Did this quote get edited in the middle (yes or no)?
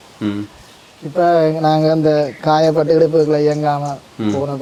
no